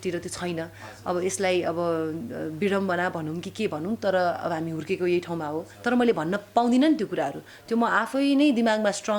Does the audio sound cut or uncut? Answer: cut